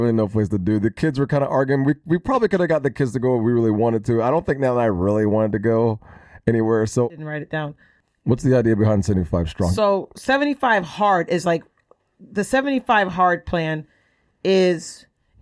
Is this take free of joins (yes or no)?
no